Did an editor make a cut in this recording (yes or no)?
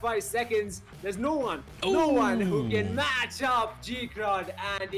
no